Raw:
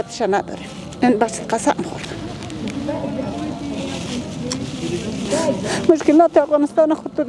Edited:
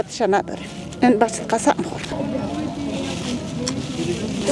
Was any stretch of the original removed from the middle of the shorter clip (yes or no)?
yes